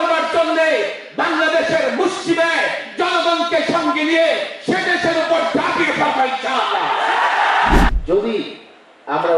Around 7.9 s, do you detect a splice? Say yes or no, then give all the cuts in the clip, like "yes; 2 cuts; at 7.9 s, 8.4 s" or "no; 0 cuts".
yes; 1 cut; at 7.9 s